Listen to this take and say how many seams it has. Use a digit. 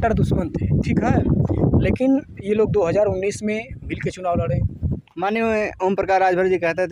1